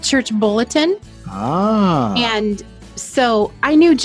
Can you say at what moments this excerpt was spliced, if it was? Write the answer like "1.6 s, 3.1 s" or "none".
none